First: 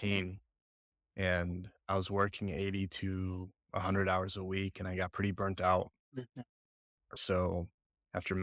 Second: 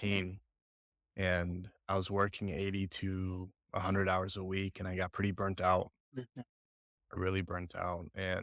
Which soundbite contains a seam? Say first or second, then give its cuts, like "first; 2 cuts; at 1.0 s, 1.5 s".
first; 1 cut; at 7.1 s